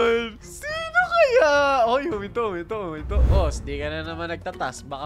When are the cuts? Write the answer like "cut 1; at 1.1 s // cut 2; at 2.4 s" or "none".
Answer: cut 1; at 3.2 s